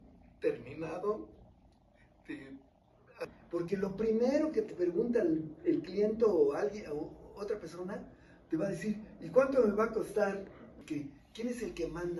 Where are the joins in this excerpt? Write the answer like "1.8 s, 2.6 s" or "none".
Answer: 3.3 s, 10.7 s